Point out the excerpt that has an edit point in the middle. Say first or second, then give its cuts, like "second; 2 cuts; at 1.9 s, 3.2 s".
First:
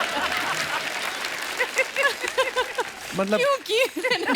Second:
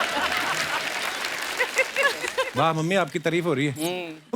second; 1 cut; at 2.5 s